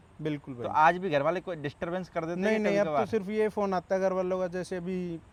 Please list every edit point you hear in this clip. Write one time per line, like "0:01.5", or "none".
none